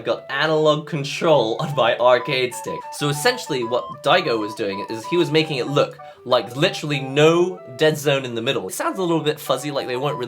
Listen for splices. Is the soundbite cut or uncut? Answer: cut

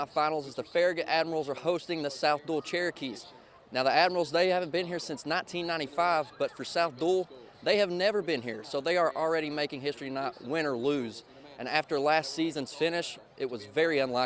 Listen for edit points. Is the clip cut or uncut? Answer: uncut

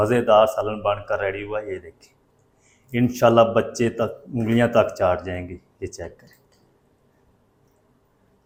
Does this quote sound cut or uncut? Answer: uncut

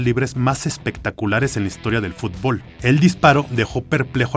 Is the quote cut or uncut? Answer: cut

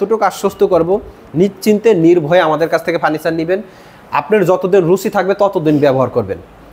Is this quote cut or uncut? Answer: uncut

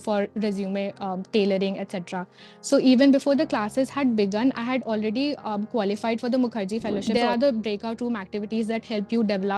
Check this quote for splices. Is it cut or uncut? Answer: cut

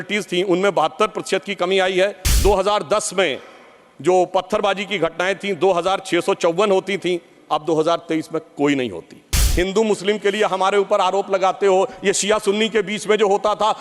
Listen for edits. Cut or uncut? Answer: cut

